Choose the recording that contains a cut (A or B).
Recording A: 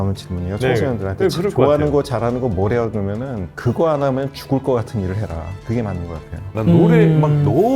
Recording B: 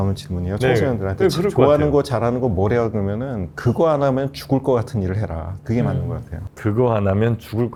A